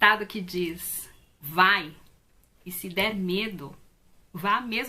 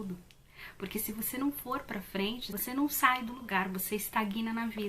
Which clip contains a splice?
second; 1 cut; at 2.5 s

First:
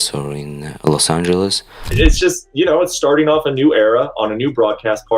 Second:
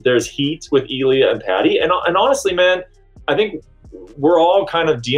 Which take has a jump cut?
first; 1 cut; at 1.9 s

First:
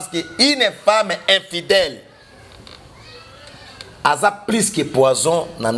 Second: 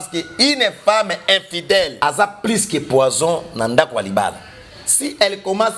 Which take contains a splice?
second; 1 cut; at 2.0 s

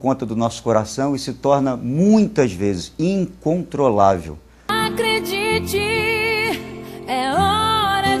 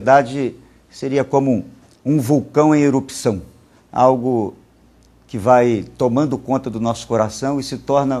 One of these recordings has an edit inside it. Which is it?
first; 1 cut; at 4.7 s

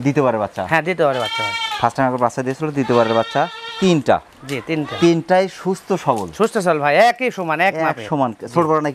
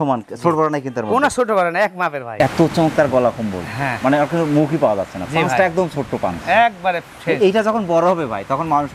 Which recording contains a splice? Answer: second; 1 cut; at 2.3 s

